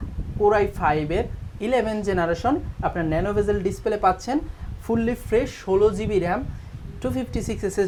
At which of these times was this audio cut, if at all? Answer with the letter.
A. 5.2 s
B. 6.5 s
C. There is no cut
C